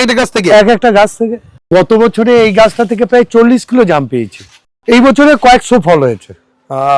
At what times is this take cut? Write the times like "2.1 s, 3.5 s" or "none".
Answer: 1.5 s, 4.7 s